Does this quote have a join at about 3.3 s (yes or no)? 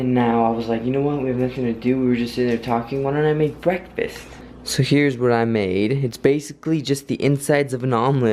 yes